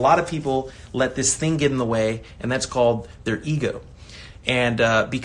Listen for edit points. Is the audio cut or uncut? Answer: uncut